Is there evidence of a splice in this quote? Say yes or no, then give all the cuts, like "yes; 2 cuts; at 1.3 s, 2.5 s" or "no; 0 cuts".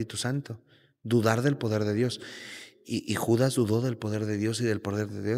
no; 0 cuts